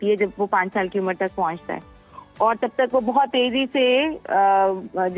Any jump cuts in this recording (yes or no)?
no